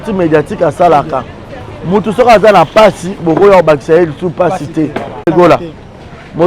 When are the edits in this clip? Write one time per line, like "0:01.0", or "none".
none